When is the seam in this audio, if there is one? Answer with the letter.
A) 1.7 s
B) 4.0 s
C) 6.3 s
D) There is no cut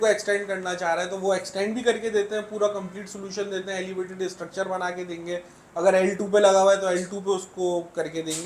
D